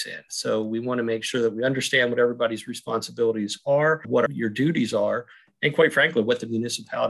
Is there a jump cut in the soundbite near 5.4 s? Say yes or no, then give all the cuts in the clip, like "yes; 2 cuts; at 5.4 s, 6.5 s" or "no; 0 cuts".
no; 1 cut; at 4.1 s